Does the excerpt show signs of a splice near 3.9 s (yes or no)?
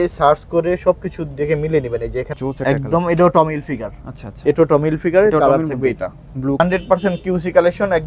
no